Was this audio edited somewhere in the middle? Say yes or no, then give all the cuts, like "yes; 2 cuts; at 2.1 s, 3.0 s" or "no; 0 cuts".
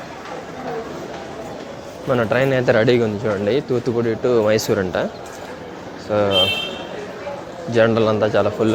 no; 0 cuts